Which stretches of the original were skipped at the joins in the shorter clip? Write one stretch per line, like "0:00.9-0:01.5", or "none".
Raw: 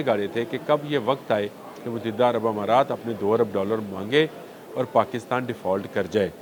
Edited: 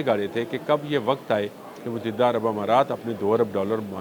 none